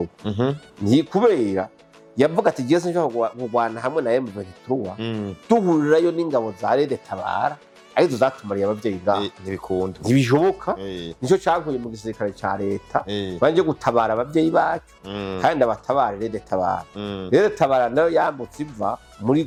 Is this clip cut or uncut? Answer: uncut